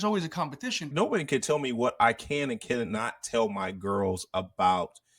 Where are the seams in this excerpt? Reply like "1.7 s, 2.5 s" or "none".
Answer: 0.9 s

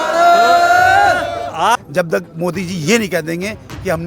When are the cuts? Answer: 1.8 s

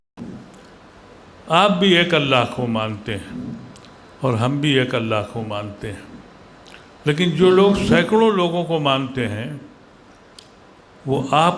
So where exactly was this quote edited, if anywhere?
none

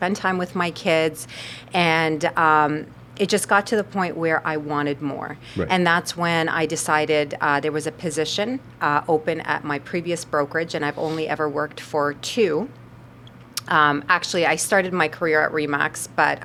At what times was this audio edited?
none

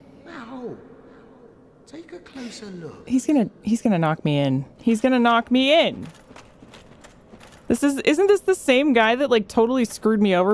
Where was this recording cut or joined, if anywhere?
none

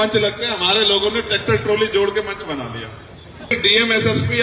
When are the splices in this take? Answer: 3.5 s

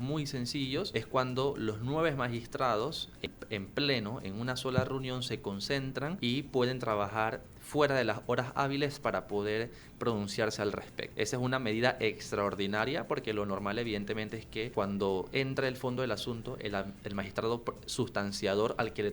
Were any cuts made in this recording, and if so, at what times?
0.9 s, 3.3 s, 6.2 s, 11.0 s, 14.7 s

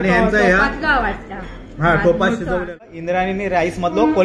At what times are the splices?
2.9 s

